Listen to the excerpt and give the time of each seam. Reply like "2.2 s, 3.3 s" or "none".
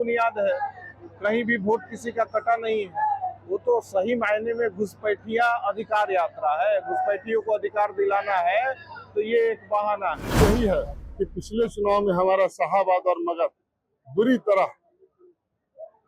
10.4 s